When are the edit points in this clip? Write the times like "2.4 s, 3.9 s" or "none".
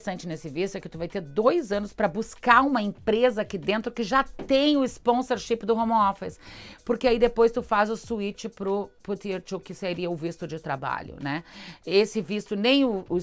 none